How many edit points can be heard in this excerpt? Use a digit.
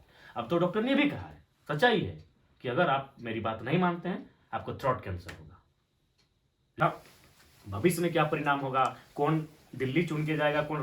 1